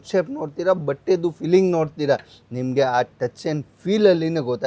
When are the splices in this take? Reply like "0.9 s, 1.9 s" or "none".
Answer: none